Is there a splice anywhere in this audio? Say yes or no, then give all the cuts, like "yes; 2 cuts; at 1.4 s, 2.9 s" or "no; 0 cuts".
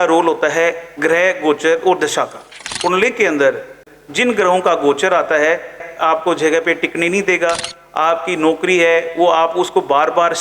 yes; 3 cuts; at 2.6 s, 3.8 s, 5.8 s